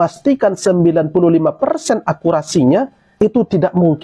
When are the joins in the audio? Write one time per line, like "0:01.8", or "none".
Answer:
0:03.0